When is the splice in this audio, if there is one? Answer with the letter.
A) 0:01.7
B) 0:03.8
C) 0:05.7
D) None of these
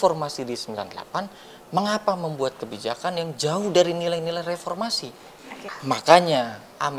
C